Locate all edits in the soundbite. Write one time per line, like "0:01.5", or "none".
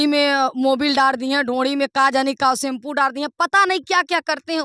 none